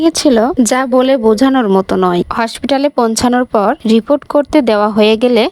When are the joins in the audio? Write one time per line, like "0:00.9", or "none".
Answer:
0:02.3